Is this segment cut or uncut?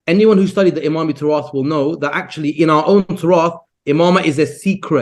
uncut